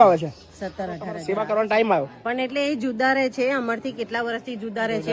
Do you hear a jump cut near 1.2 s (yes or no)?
yes